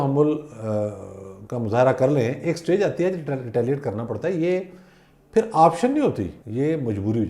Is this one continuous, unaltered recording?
no; 1 cut; at 6.4 s

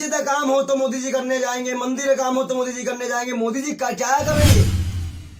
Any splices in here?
yes; 1 cut; at 4.4 s

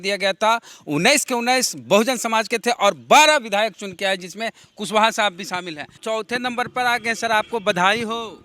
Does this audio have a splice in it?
yes; 1 cut; at 6.0 s

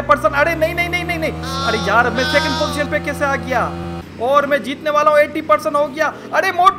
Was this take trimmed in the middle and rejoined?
yes; 1 cut; at 4.0 s

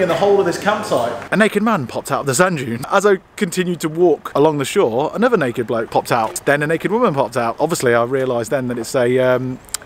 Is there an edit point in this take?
yes; 4 cuts; at 1.2 s, 2.9 s, 6.3 s, 7.5 s

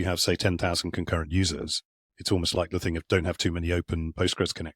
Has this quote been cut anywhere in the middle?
yes; 1 cut; at 3.0 s

